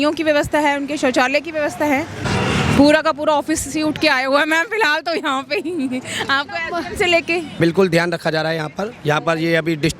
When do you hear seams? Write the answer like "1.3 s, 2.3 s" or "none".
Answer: 2.2 s, 7.6 s